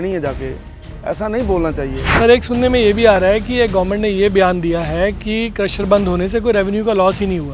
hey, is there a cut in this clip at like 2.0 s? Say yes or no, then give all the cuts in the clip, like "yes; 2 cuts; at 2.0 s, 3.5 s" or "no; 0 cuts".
yes; 1 cut; at 2.0 s